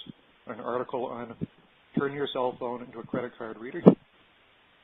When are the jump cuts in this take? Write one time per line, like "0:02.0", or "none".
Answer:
none